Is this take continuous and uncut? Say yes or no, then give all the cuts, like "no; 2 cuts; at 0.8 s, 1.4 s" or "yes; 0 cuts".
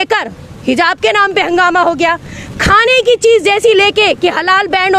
yes; 0 cuts